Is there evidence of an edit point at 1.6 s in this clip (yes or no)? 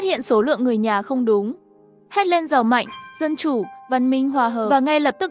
no